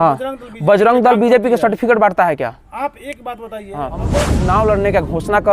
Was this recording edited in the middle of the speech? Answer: yes; 1 cut; at 4.3 s

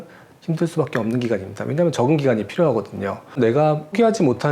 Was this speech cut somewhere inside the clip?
yes; 1 cut; at 3.4 s

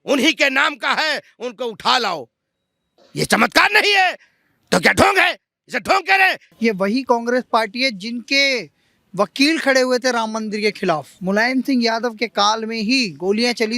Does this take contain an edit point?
yes; 2 cuts; at 6.4 s, 11.1 s

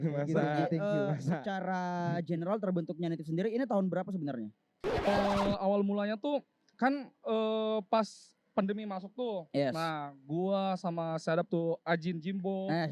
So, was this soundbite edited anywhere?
yes; 1 cut; at 5.1 s

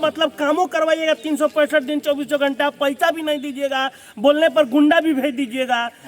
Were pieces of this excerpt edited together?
no; 0 cuts

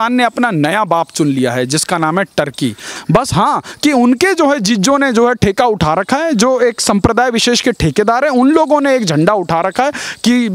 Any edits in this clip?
yes; 1 cut; at 2.9 s

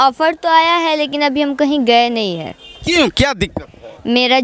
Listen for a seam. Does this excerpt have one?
no; 0 cuts

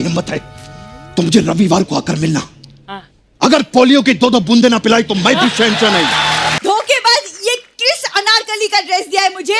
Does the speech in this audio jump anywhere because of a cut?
yes; 1 cut; at 6.5 s

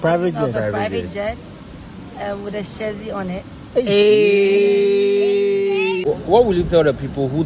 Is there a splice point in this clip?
yes; 1 cut; at 6.0 s

